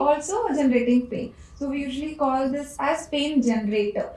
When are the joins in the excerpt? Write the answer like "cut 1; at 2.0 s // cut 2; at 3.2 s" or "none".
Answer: none